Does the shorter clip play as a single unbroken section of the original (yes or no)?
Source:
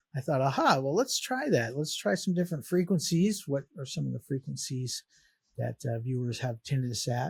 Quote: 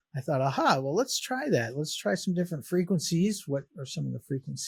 yes